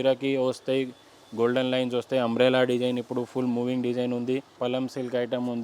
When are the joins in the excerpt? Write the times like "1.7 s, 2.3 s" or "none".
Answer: 4.6 s